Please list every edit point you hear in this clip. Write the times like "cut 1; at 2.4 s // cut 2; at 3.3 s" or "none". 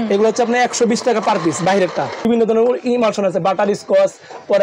cut 1; at 2.1 s